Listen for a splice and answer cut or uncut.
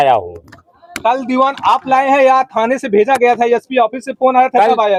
uncut